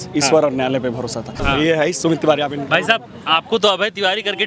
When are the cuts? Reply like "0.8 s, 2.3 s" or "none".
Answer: 1.4 s